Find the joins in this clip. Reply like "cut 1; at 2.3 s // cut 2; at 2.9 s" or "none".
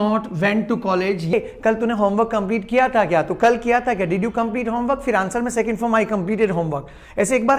cut 1; at 1.3 s